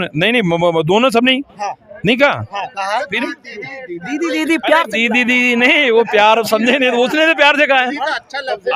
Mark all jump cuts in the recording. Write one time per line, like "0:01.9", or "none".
none